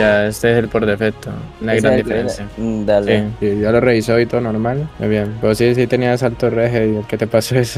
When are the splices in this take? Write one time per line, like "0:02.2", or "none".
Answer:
0:03.3